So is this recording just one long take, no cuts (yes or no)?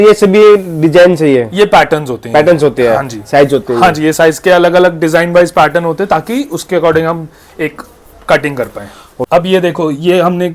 no